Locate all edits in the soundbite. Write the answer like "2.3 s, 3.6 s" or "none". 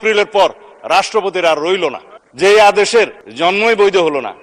2.1 s